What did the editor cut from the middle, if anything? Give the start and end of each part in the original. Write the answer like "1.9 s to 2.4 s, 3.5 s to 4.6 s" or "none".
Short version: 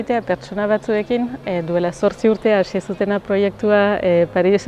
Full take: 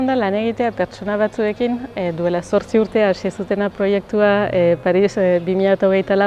none